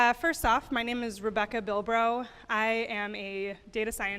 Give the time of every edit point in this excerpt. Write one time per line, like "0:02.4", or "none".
0:03.2